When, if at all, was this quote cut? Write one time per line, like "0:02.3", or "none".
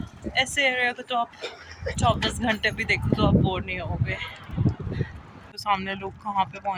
0:05.5